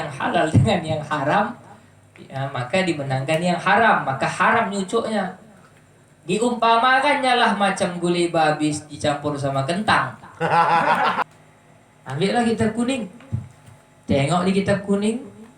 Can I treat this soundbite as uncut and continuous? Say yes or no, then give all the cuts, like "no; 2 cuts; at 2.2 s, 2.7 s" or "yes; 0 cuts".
no; 1 cut; at 11.2 s